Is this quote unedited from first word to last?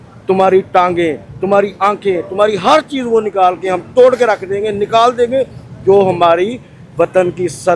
yes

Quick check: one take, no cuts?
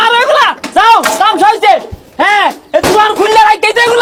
yes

